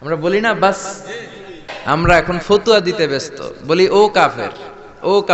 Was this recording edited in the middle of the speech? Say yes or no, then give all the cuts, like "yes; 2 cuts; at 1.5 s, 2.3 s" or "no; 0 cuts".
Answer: yes; 1 cut; at 1.7 s